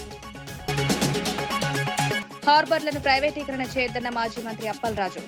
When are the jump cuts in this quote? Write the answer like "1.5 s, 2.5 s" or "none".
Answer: 0.7 s, 2.2 s